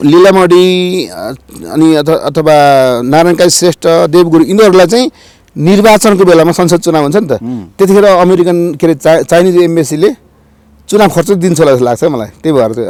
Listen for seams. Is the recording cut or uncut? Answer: uncut